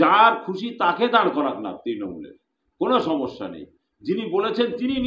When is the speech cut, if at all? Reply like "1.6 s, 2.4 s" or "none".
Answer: none